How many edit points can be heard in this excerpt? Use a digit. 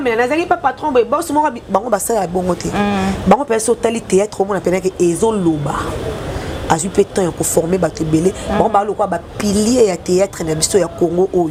0